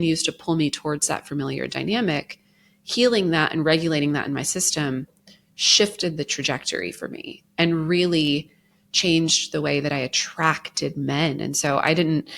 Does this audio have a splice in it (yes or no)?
no